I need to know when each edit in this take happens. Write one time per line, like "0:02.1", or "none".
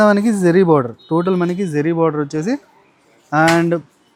none

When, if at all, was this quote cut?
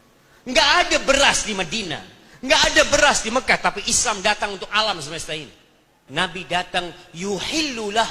0:06.0

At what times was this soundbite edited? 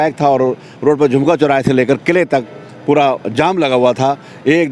none

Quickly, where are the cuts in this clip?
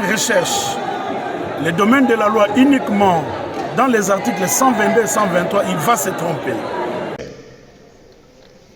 0:07.2

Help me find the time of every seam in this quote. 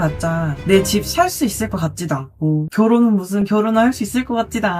0:02.7

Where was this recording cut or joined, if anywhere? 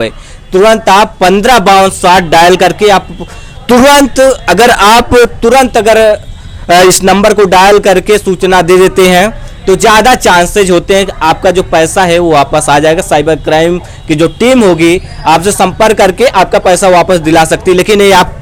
none

